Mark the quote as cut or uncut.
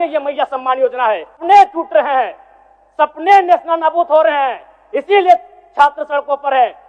cut